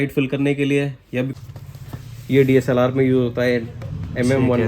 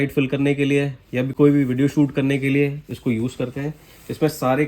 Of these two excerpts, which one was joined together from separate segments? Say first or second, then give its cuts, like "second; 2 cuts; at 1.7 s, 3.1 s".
first; 1 cut; at 1.3 s